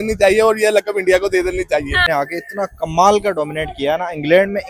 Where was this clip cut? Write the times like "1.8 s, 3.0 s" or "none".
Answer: 2.1 s